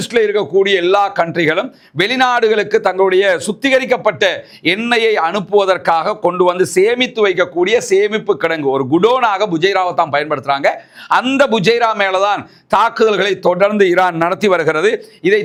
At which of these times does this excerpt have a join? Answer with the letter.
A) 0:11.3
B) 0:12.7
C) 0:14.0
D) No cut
D